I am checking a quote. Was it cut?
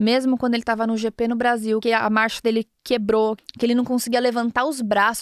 yes; 2 cuts; at 1.8 s, 3.4 s

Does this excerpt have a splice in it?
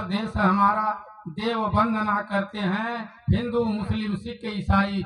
no; 0 cuts

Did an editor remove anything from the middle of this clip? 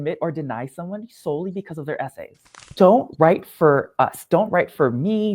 yes; 2 cuts; at 2.6 s, 4.3 s

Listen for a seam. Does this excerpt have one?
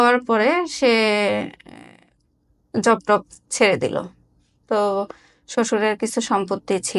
no; 0 cuts

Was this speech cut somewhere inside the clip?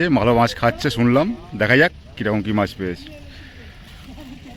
no; 0 cuts

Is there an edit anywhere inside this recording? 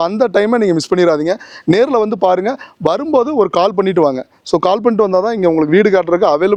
no; 0 cuts

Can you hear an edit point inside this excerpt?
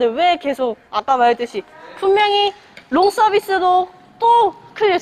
no; 0 cuts

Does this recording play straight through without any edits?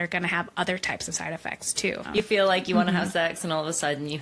no; 1 cut; at 2.2 s

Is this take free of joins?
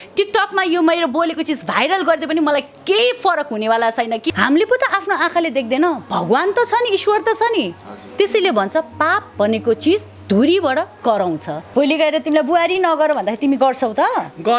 no; 2 cuts; at 4.3 s, 11.5 s

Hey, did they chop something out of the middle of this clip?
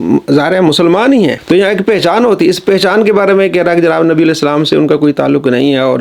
yes; 1 cut; at 1.4 s

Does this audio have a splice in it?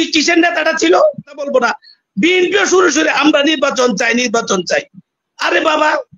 yes; 1 cut; at 1.5 s

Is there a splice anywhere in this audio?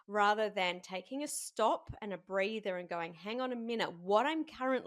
no; 0 cuts

